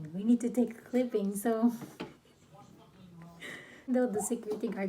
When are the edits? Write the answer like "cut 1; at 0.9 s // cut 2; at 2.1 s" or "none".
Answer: cut 1; at 3.9 s

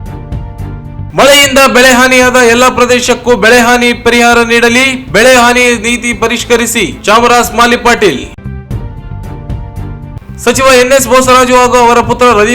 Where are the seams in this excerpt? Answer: cut 1; at 1.1 s

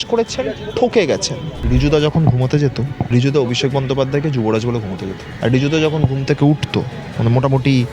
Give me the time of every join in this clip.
cut 1; at 1.5 s // cut 2; at 2.9 s // cut 3; at 5.2 s // cut 4; at 7.0 s

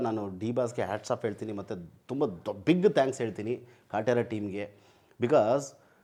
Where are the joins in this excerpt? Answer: none

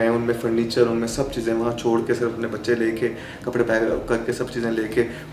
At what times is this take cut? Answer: none

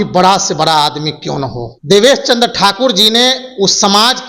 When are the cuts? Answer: cut 1; at 1.7 s

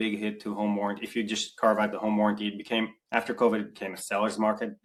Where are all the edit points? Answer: none

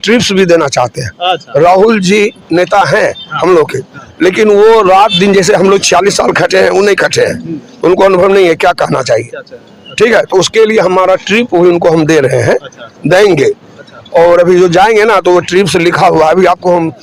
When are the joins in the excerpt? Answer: none

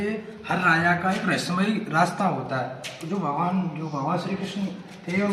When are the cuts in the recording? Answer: none

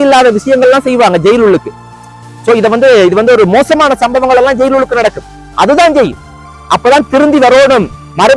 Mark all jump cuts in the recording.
none

